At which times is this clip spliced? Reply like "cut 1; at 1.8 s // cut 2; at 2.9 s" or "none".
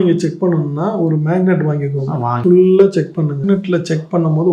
cut 1; at 2.3 s // cut 2; at 3.4 s

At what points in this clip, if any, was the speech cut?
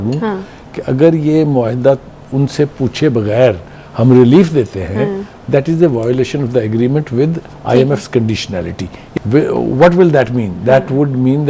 cut 1; at 9.0 s

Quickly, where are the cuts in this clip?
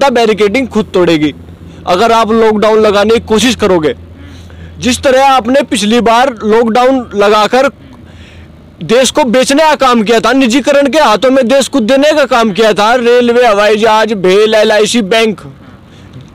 none

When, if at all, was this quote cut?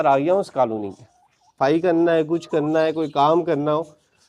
cut 1; at 1.5 s

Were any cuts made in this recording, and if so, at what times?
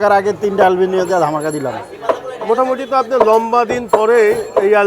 none

